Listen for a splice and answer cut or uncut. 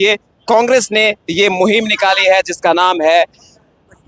uncut